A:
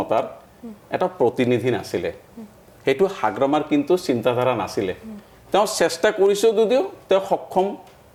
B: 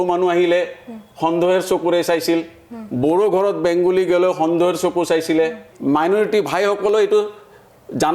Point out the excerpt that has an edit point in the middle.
B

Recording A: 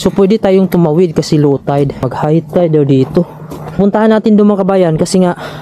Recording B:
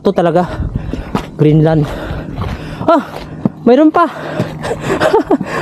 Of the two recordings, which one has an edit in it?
A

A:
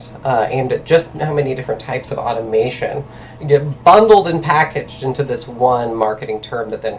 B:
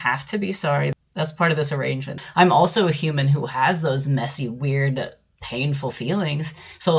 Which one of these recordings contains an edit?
B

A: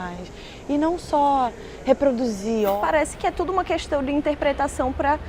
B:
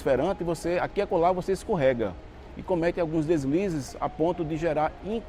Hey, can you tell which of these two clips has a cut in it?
A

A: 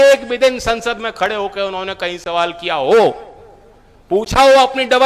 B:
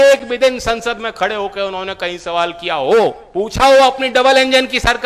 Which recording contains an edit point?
B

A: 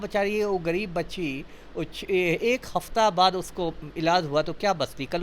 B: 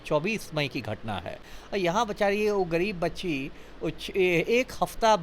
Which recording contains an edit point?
B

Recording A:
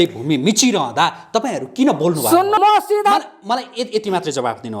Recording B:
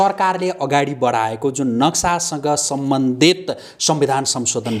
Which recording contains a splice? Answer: A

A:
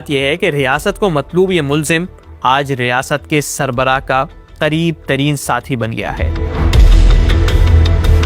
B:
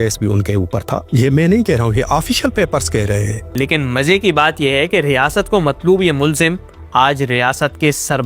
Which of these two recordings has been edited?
B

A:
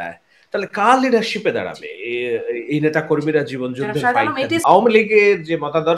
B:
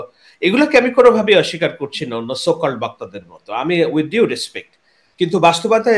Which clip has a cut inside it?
A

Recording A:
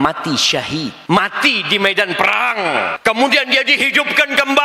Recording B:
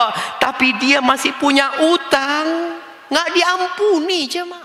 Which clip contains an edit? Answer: A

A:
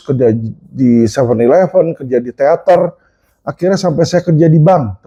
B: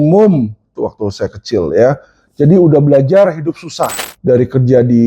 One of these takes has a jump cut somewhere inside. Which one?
B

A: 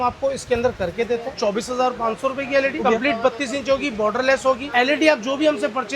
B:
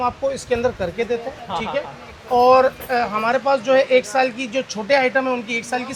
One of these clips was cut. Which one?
A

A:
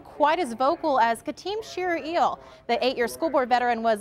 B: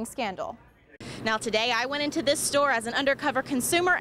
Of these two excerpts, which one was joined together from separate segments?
B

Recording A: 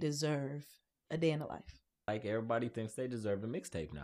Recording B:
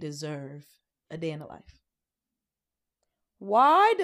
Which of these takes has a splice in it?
A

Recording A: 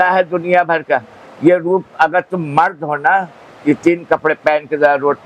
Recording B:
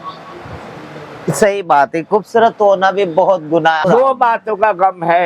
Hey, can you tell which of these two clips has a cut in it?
B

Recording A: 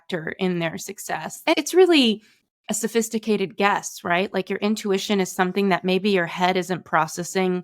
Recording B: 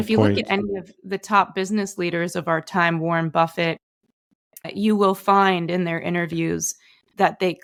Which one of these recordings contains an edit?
A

